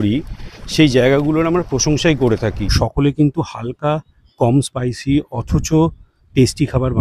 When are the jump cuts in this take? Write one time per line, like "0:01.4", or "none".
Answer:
0:02.7